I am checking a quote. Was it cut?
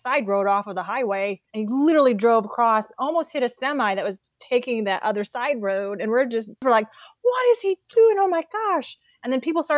yes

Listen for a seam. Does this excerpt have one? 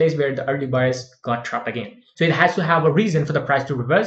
yes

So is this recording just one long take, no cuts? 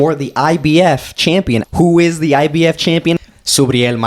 no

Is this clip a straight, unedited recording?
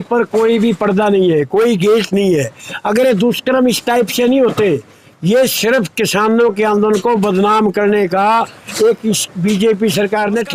yes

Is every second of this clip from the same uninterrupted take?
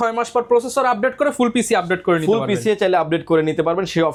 yes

